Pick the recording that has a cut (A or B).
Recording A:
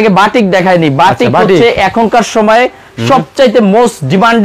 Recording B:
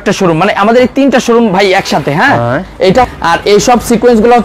B